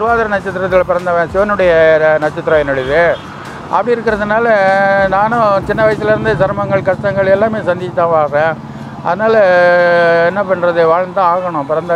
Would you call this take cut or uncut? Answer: uncut